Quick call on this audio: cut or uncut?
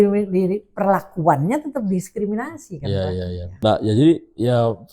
cut